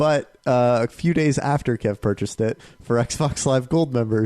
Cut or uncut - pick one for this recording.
cut